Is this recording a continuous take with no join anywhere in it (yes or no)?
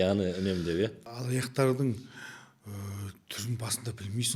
no